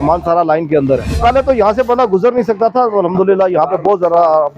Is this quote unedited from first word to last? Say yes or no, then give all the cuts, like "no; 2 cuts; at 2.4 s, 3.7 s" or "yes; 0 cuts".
no; 1 cut; at 1.1 s